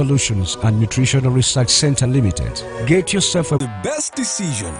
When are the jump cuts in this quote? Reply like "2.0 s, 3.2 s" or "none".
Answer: 3.6 s